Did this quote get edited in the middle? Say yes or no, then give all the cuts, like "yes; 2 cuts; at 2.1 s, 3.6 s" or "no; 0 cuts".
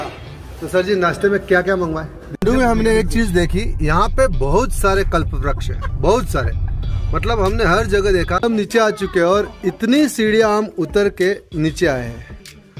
yes; 2 cuts; at 2.3 s, 8.4 s